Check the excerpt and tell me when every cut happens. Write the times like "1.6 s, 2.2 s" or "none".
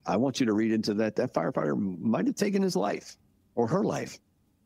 1.1 s